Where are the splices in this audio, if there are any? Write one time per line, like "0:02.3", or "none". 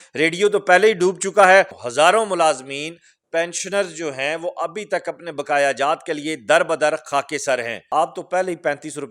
0:01.7
0:07.8